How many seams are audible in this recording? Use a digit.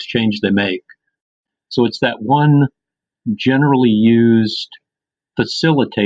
1